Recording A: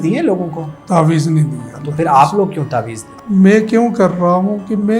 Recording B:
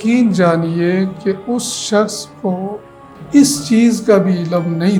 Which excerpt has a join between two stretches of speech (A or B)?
A